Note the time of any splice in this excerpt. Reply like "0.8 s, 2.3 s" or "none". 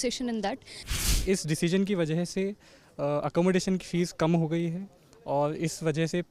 1.1 s